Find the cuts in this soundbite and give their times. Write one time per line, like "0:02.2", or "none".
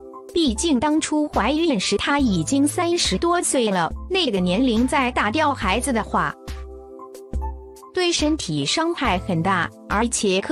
0:06.4
0:07.9